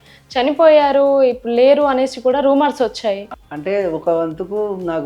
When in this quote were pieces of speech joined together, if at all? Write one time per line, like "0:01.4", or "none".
0:03.3